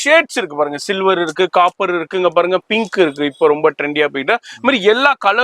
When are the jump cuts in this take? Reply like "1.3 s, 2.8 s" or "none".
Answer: none